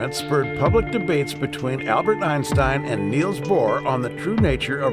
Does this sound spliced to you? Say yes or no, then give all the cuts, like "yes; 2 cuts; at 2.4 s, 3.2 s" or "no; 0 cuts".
yes; 1 cut; at 3.9 s